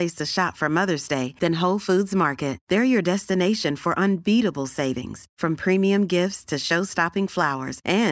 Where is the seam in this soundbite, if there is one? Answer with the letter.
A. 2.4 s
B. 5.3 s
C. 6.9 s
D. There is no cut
D